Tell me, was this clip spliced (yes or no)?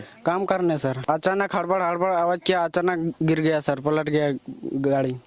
yes